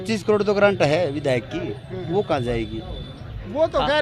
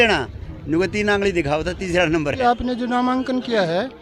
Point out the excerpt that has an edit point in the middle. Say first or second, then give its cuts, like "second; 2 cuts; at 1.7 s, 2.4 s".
second; 1 cut; at 2.4 s